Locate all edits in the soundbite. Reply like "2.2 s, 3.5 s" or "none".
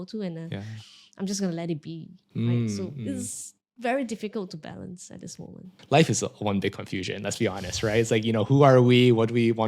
5.7 s